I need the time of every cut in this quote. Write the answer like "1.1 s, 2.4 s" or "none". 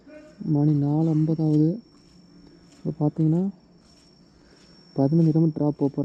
none